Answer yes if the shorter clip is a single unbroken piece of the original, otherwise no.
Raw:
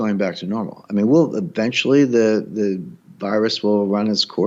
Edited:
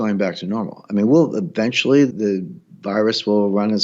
no